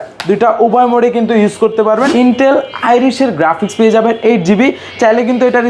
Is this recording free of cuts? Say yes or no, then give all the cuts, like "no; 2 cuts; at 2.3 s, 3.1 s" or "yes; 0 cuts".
no; 1 cut; at 2.1 s